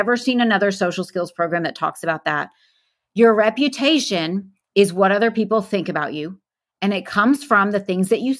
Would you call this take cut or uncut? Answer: uncut